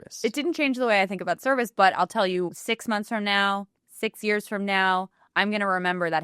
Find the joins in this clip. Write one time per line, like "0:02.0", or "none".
0:02.7